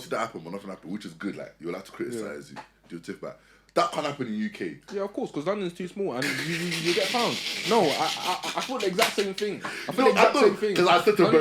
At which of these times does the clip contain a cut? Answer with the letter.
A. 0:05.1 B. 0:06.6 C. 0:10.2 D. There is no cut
D